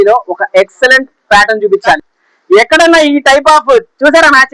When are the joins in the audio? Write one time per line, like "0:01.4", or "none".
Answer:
0:02.0